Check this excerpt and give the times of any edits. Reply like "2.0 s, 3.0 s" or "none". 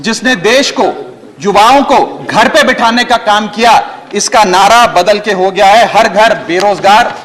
none